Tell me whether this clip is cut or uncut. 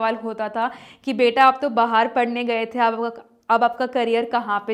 uncut